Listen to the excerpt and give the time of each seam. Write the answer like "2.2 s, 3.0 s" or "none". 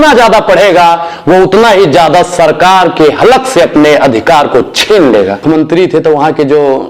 5.4 s